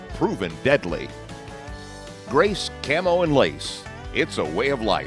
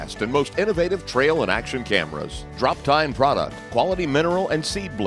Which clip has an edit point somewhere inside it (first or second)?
second